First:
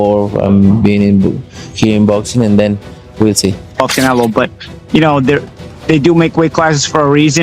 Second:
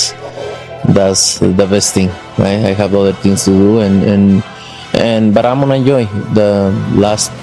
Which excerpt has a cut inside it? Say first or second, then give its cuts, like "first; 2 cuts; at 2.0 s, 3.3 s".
first; 1 cut; at 3.8 s